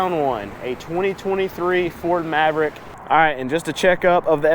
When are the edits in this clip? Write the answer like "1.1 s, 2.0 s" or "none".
2.9 s